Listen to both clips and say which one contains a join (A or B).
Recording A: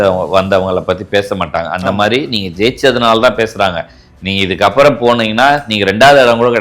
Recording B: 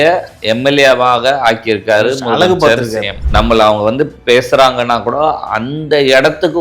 B